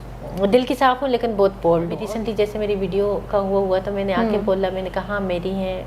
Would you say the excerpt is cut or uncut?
cut